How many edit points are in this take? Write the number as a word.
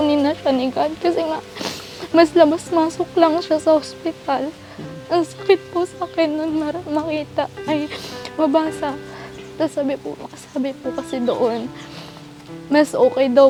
zero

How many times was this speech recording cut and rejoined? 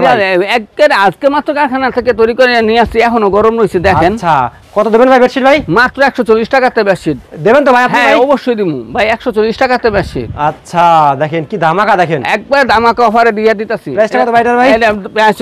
zero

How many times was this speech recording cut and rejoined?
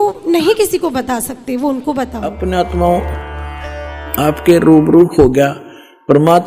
one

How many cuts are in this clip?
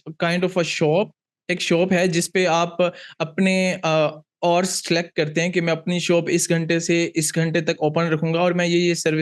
zero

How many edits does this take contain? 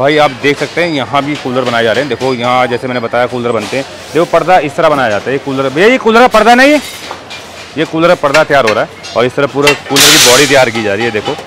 zero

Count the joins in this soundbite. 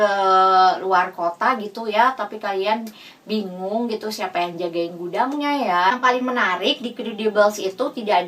one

